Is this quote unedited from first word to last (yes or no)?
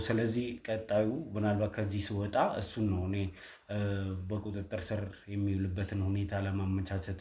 yes